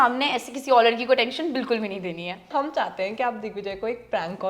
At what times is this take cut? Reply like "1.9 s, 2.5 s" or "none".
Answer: 2.5 s